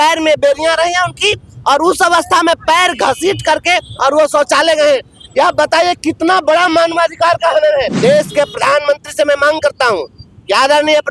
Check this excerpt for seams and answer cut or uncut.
cut